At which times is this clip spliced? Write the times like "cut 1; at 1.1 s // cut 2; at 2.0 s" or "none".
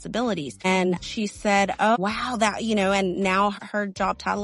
cut 1; at 1.0 s // cut 2; at 2.0 s // cut 3; at 3.6 s